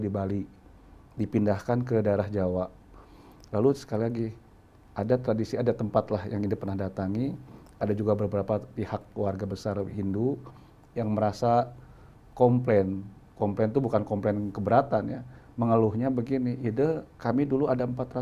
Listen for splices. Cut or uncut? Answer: uncut